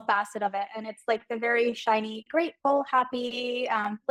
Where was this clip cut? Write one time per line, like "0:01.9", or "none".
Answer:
none